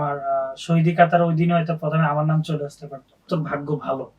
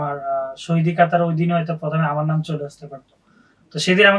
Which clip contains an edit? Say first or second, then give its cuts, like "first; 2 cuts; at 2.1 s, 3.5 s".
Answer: first; 1 cut; at 3.3 s